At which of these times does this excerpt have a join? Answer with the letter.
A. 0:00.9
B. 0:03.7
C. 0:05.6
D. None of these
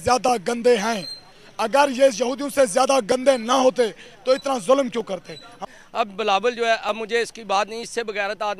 C